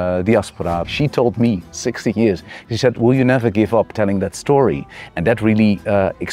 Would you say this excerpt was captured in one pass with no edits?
no; 1 cut; at 0.9 s

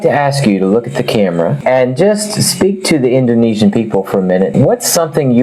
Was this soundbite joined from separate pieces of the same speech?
no; 0 cuts

